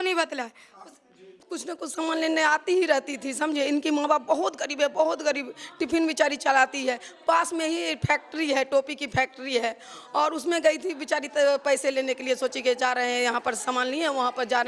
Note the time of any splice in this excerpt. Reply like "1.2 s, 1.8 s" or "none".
1.5 s

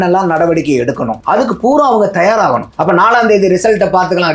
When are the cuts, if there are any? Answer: 1.2 s, 2.7 s

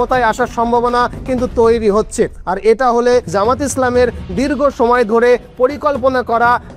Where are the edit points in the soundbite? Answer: 3.3 s

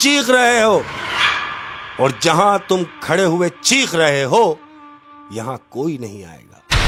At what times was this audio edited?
none

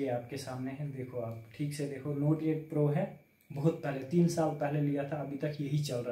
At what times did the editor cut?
none

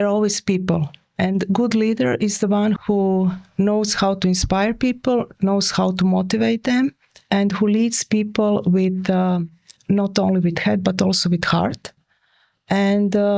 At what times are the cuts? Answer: 2.8 s

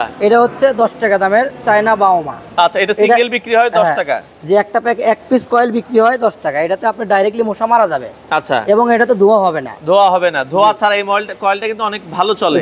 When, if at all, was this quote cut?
none

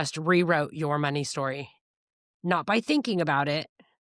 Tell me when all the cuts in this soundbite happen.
none

